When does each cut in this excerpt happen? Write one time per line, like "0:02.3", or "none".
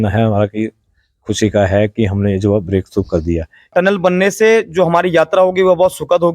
0:03.7